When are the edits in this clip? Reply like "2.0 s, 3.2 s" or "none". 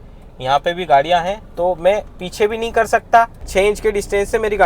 3.5 s